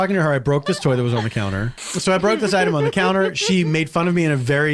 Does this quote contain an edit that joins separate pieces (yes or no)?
yes